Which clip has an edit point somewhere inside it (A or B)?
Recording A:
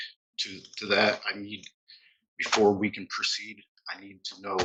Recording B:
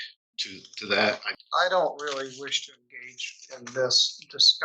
B